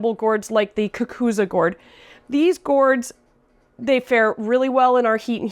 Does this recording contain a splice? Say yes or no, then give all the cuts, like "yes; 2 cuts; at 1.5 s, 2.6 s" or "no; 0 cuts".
no; 0 cuts